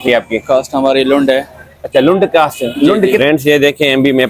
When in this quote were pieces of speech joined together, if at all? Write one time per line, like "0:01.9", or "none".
0:03.2